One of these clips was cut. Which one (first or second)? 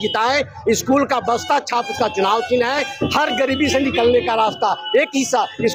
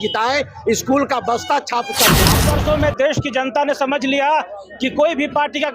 second